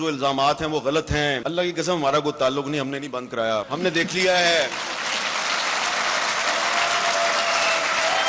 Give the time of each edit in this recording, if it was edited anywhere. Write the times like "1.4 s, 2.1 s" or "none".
1.4 s, 3.7 s